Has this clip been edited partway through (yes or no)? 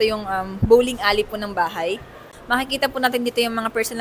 yes